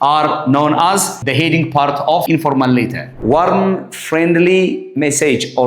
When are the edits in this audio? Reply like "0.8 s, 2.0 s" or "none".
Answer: 1.2 s, 2.2 s, 3.1 s